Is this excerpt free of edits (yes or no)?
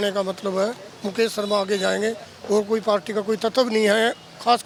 yes